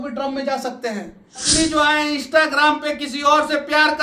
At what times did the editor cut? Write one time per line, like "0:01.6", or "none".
0:01.5